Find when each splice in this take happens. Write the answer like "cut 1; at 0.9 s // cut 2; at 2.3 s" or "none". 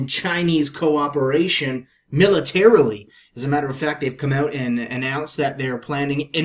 cut 1; at 3.9 s